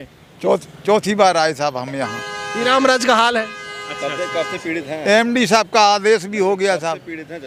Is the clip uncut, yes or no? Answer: yes